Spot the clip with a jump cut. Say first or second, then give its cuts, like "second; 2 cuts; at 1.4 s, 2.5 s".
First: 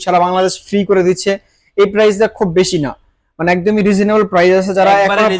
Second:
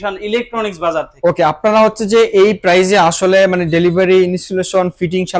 second; 1 cut; at 1.1 s